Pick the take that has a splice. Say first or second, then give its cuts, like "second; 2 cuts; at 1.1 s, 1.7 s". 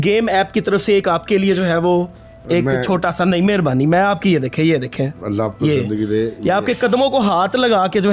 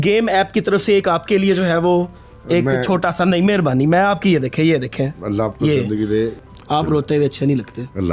second; 1 cut; at 6.4 s